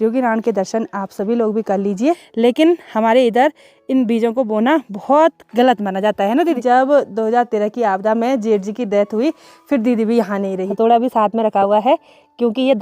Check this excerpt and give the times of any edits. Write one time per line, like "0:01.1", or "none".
0:02.3
0:06.6
0:10.7

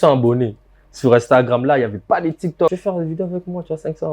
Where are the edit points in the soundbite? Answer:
0:02.7

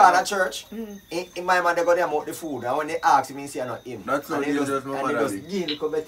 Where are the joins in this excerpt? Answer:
none

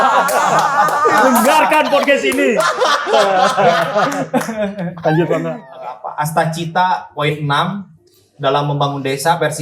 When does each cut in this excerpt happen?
0:05.8

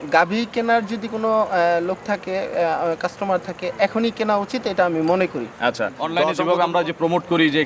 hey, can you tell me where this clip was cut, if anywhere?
0:06.0

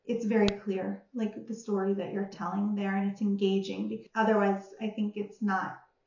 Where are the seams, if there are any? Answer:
0:04.0

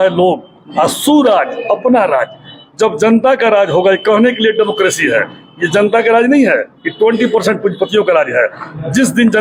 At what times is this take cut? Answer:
none

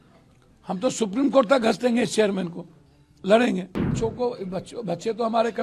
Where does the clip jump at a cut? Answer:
0:03.9

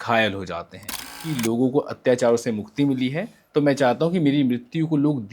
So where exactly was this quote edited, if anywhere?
0:01.2

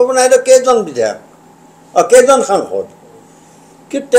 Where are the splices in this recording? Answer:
none

